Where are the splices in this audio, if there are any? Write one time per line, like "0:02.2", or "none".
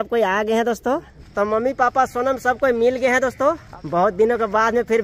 0:01.2
0:03.7

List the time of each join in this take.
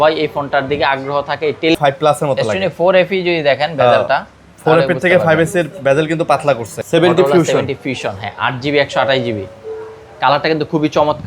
0:01.8
0:06.7

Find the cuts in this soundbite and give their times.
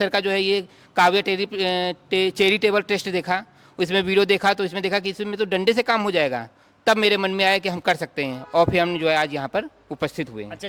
none

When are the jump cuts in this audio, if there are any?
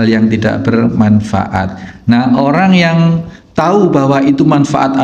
0:01.8

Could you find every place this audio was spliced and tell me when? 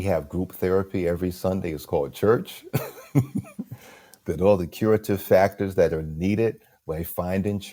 none

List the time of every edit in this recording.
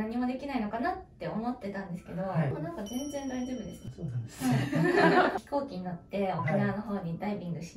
0:02.5
0:03.8
0:05.4

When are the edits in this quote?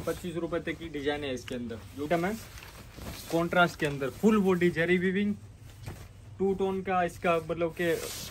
0:02.1

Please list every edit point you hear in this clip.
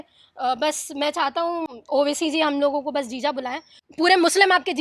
0:03.8

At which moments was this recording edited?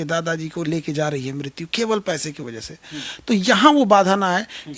none

